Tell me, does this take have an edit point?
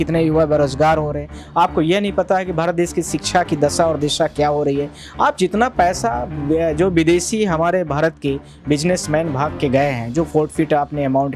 no; 0 cuts

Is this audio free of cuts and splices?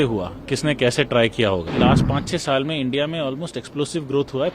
no; 1 cut; at 1.7 s

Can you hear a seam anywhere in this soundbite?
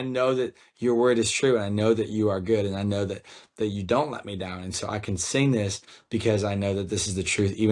no; 0 cuts

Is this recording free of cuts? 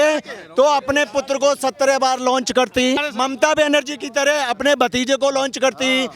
no; 1 cut; at 3.0 s

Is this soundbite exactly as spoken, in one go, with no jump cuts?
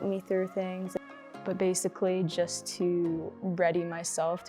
no; 2 cuts; at 1.0 s, 3.3 s

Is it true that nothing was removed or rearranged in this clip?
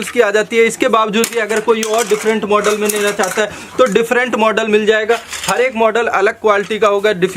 yes; 0 cuts

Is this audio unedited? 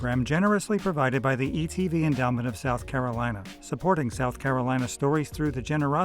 yes; 0 cuts

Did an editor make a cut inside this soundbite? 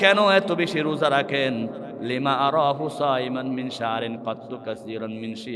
no; 0 cuts

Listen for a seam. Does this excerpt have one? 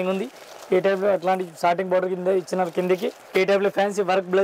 yes; 1 cut; at 3.2 s

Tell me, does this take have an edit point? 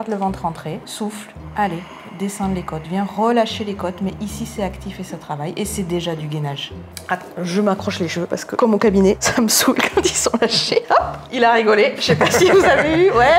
yes; 4 cuts; at 0.9 s, 2.0 s, 7.0 s, 9.2 s

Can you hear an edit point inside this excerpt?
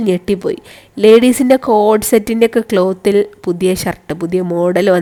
no; 0 cuts

